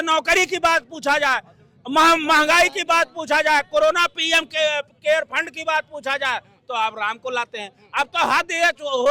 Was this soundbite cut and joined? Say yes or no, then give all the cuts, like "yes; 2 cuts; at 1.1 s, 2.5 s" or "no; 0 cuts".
no; 0 cuts